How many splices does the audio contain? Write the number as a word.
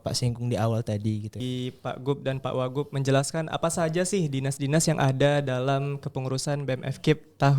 one